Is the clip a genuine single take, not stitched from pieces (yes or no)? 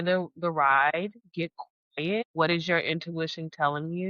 no